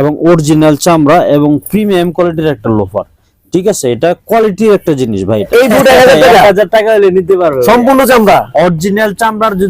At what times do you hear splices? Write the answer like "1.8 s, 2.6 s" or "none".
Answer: 5.5 s